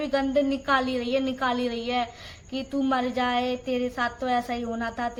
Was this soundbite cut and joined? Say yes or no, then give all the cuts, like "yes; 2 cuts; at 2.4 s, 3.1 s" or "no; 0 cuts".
no; 0 cuts